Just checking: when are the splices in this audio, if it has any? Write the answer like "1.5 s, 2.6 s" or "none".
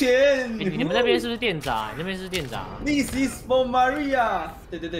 none